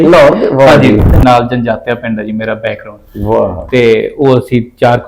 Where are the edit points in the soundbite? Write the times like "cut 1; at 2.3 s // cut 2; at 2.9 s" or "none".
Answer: cut 1; at 1.1 s